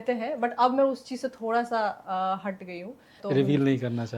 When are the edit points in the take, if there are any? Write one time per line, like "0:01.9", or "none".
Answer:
0:03.2

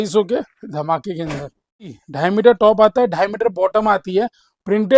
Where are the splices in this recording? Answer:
0:02.0

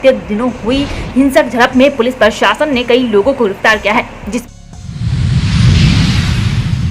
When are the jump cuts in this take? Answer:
0:04.4

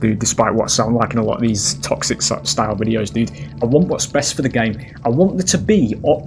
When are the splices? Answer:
none

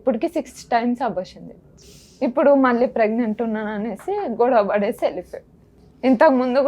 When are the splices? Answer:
none

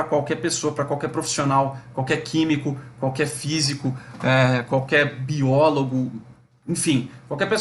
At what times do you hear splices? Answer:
none

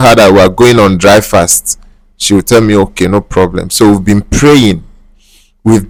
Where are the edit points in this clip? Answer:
none

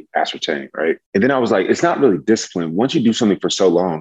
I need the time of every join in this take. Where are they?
0:01.0

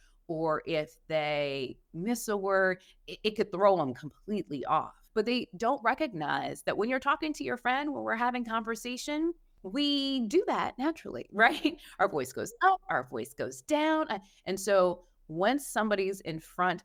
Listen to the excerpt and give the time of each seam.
none

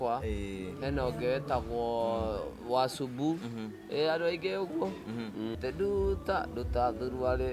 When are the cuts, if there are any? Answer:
0:05.6

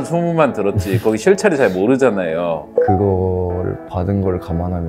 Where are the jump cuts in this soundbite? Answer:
0:02.6

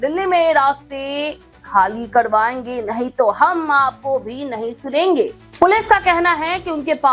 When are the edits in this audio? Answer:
0:05.5

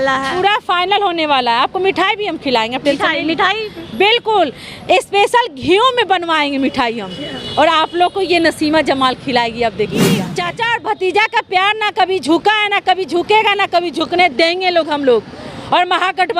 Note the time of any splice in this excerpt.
0:10.3

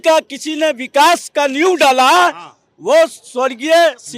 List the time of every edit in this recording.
none

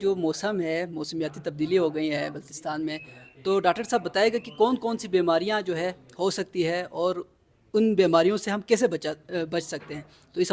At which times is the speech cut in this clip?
none

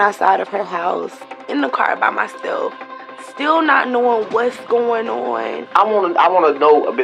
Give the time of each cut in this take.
0:01.3
0:05.6

